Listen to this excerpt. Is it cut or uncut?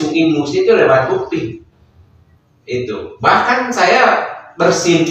uncut